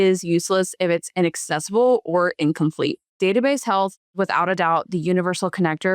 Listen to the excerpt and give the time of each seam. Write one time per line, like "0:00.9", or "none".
0:03.1
0:04.2